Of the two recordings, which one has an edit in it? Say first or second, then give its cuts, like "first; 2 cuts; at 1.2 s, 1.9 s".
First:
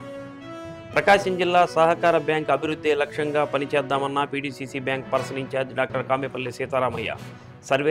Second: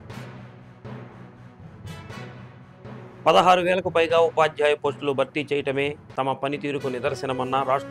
first; 1 cut; at 0.9 s